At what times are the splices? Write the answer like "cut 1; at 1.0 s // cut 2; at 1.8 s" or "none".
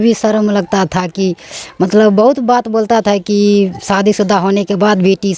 none